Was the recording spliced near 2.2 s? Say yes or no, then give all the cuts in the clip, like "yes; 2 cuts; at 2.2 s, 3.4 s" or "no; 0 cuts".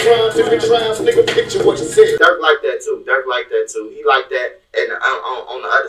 yes; 1 cut; at 2.2 s